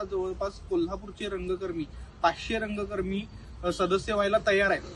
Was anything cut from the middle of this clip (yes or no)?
no